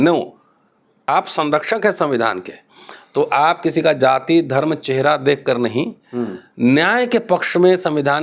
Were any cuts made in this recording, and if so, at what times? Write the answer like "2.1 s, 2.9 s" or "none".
1.1 s